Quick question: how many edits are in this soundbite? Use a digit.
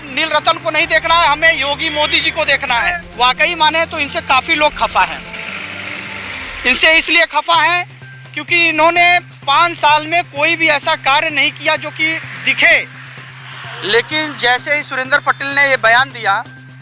1